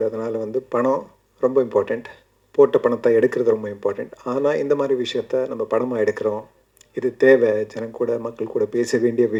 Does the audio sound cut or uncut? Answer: uncut